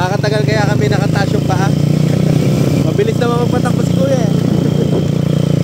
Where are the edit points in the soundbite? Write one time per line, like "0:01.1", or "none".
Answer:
0:02.7